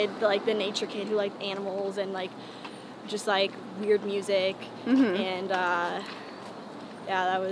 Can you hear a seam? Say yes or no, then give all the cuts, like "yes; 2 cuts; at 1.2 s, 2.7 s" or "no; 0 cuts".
no; 0 cuts